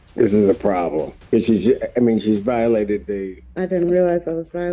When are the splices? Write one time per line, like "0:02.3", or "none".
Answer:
0:01.2
0:03.4